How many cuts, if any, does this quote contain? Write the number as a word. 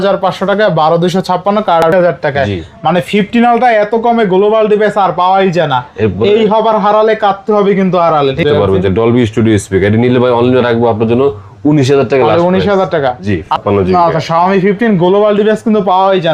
three